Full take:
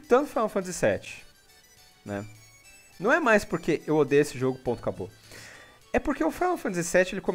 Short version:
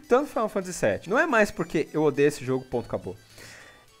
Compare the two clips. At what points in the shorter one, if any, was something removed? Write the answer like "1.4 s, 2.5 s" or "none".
1.0 s